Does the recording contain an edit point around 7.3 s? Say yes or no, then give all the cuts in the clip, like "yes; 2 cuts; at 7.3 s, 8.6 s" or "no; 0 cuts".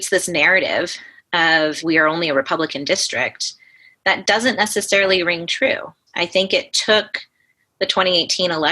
no; 2 cuts; at 1.8 s, 6.0 s